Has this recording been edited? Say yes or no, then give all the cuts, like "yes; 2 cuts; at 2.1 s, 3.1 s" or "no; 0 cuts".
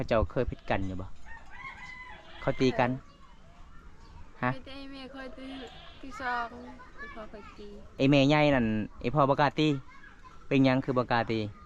yes; 1 cut; at 7.8 s